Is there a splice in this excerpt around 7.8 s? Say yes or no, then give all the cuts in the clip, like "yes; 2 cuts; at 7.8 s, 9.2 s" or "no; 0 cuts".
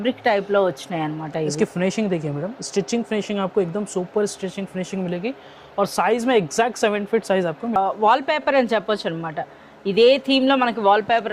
yes; 1 cut; at 7.8 s